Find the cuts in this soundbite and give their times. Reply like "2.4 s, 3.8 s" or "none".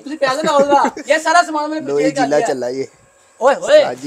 1.0 s